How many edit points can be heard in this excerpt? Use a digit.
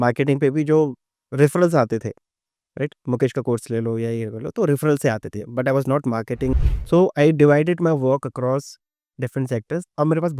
1